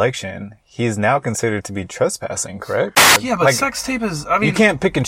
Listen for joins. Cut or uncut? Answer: cut